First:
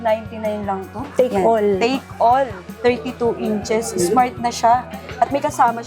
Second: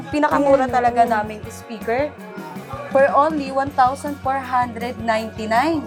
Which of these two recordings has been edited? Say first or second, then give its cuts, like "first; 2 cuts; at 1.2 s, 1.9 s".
first; 2 cuts; at 1.0 s, 2.6 s